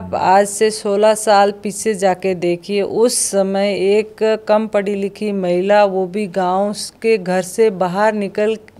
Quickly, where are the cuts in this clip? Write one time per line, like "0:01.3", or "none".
none

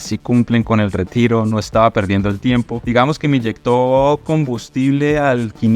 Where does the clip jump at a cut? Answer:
0:02.8

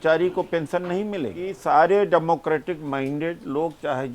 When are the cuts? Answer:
0:01.5

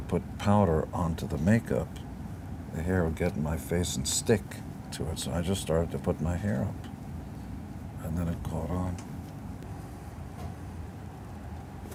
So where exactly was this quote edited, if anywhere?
none

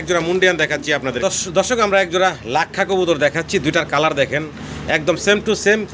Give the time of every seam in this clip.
0:01.2

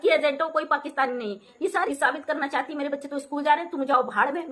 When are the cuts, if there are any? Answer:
0:01.9

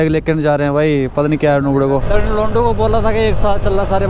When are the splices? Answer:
0:02.0

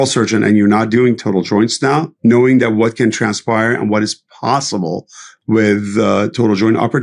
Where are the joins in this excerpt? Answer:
0:02.1

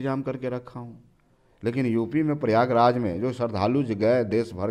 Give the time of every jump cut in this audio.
none

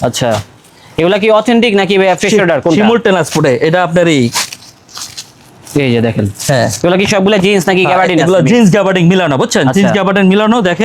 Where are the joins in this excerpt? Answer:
none

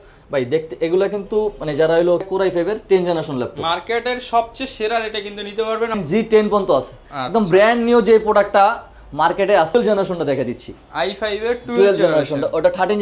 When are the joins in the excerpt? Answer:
0:02.2
0:06.0
0:09.7

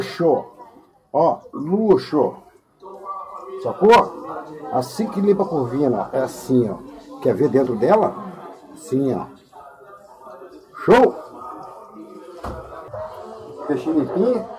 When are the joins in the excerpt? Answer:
0:12.9

